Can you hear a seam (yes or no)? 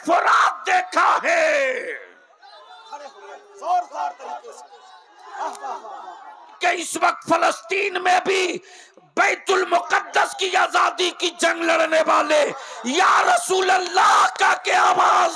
yes